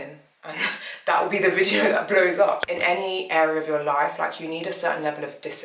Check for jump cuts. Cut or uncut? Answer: cut